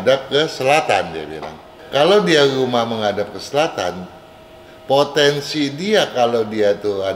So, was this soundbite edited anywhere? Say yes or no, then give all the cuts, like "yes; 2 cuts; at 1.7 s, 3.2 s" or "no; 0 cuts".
yes; 1 cut; at 1.8 s